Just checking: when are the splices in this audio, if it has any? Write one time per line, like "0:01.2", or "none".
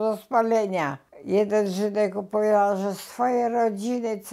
0:01.1